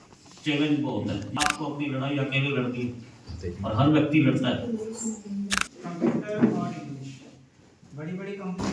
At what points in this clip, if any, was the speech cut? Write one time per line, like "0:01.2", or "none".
0:01.3
0:05.5